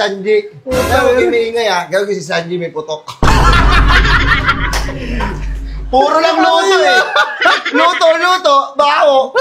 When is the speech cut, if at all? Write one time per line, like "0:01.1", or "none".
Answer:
none